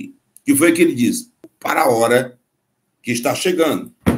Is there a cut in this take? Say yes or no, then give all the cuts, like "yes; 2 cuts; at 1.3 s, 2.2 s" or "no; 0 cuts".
yes; 1 cut; at 1.5 s